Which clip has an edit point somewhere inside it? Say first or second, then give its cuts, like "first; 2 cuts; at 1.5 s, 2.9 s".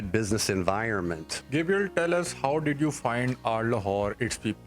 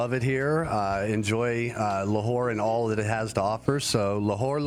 first; 1 cut; at 1.3 s